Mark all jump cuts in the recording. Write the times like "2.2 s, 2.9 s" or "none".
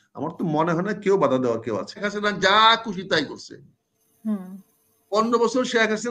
2.0 s